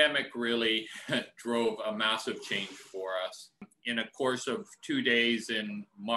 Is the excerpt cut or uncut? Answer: cut